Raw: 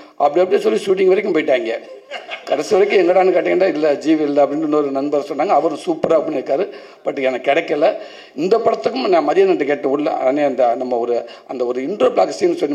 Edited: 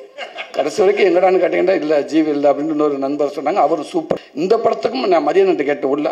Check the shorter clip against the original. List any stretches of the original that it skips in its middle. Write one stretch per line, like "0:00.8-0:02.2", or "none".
0:06.1-0:08.2